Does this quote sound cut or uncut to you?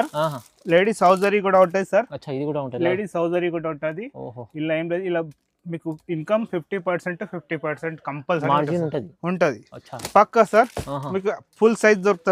uncut